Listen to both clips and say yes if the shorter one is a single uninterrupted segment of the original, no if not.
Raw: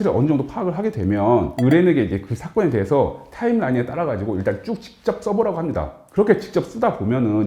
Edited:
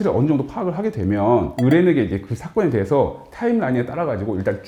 yes